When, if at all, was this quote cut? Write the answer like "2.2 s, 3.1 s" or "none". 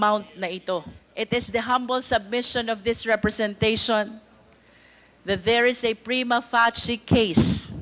1.0 s